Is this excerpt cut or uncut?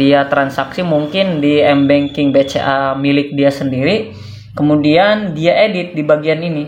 uncut